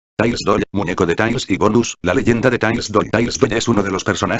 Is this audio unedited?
yes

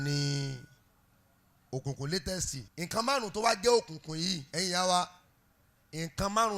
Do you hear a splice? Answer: yes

